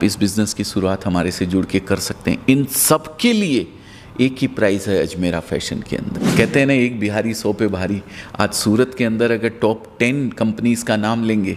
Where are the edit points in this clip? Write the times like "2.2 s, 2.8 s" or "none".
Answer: 6.2 s